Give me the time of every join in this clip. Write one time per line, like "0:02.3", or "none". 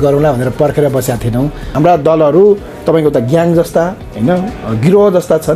0:01.6